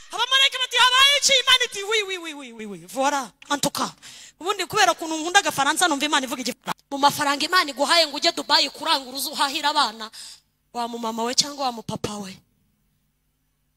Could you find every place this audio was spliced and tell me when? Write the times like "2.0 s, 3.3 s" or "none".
6.7 s